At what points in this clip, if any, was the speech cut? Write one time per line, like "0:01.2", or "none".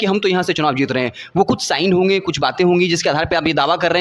none